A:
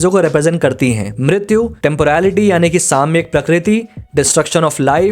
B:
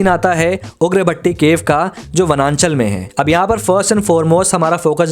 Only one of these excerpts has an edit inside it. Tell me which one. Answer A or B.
B